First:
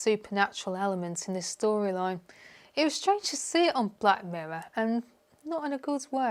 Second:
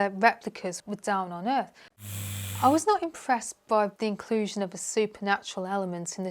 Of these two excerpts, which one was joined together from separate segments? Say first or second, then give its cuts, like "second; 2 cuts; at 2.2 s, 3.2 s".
second; 3 cuts; at 0.8 s, 2.0 s, 3.9 s